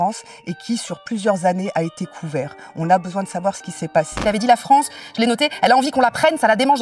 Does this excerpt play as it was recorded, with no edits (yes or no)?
no